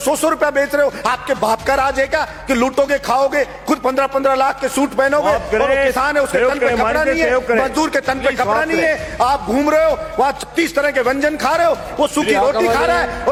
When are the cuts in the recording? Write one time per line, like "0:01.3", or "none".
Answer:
none